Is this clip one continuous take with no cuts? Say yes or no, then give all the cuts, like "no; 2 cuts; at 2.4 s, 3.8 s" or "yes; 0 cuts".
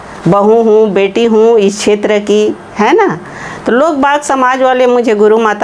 yes; 0 cuts